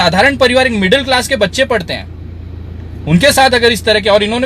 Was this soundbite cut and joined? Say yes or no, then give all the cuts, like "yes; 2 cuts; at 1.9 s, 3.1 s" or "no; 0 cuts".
no; 0 cuts